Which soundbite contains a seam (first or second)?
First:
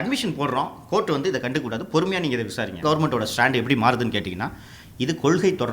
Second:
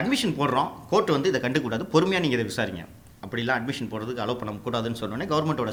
first